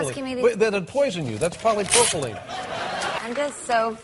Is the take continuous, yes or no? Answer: yes